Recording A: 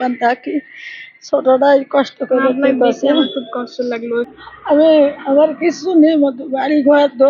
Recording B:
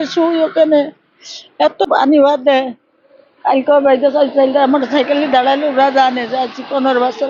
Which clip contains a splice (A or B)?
A